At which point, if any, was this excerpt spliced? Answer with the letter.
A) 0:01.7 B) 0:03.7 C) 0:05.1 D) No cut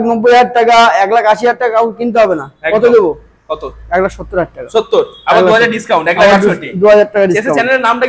D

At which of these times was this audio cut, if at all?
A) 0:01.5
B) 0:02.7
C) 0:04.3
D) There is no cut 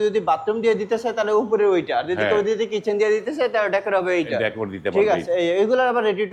D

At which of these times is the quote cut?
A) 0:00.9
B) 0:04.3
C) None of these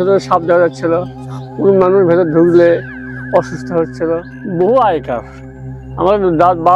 B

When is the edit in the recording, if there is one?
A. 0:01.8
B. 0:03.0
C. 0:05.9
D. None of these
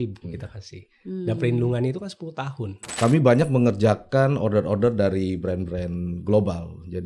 B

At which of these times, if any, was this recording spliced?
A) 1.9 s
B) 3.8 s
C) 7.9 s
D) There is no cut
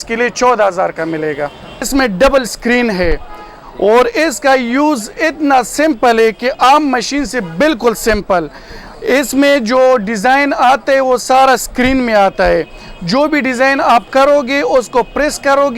A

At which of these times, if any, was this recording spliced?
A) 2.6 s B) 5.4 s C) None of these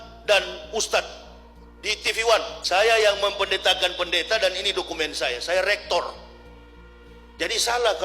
A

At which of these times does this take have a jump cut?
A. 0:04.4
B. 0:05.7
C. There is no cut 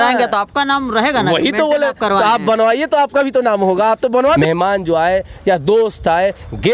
A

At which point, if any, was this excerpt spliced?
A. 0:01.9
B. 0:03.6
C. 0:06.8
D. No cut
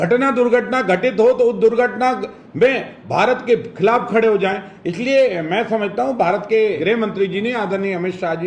C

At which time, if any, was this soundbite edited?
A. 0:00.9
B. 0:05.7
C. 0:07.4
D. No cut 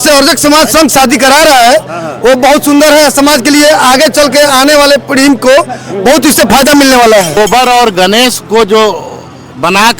C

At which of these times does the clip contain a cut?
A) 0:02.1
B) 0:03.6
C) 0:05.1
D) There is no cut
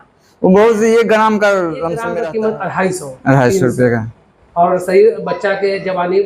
A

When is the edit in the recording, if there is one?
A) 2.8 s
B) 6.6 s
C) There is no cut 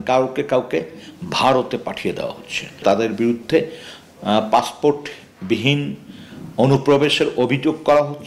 A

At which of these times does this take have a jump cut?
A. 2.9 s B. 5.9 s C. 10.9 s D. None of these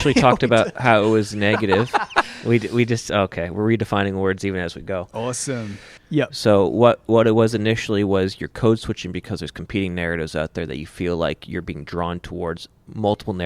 B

